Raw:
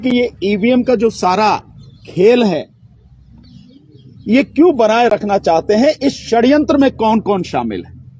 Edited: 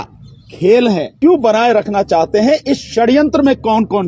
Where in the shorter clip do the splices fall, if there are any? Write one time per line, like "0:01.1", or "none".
0:01.1